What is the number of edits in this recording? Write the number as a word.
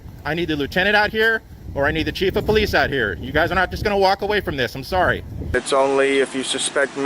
one